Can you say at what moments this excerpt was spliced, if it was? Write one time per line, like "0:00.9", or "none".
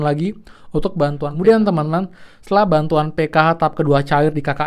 0:01.2